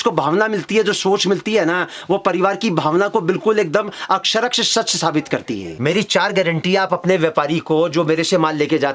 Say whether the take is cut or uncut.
cut